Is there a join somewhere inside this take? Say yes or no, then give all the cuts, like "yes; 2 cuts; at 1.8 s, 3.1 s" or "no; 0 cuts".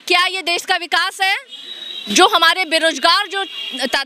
no; 0 cuts